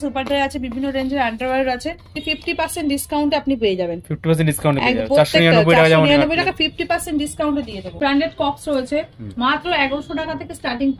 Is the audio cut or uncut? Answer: cut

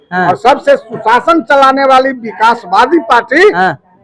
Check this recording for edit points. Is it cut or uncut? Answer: uncut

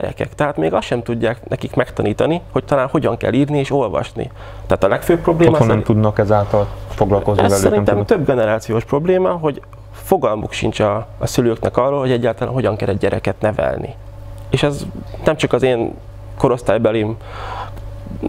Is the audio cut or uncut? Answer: uncut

